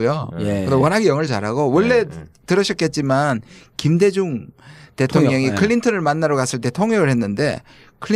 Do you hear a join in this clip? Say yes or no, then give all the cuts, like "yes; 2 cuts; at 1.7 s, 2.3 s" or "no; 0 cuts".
no; 0 cuts